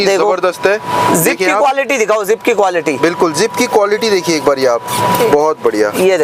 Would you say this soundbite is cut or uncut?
uncut